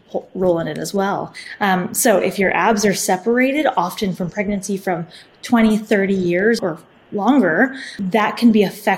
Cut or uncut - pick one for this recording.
cut